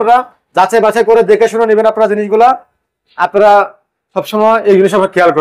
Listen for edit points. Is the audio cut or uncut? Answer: uncut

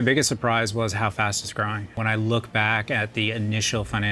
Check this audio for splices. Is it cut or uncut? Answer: cut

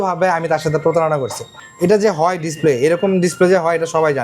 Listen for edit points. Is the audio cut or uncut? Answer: uncut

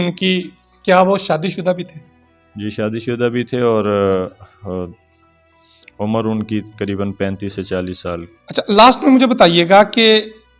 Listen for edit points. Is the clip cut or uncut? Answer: uncut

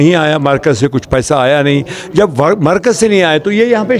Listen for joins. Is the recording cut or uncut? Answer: uncut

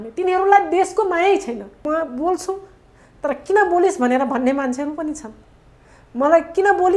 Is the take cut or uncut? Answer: cut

